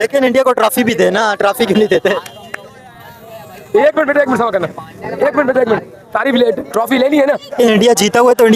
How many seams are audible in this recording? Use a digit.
1